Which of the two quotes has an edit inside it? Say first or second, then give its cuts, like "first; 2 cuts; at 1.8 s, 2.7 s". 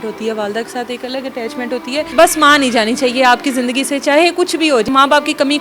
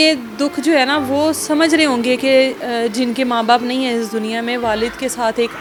first; 2 cuts; at 2.1 s, 4.9 s